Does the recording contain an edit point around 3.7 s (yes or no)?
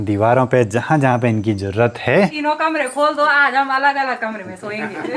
no